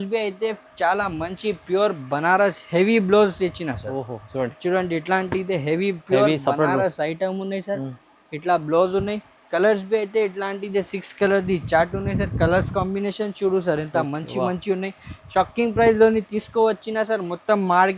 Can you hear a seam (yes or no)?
no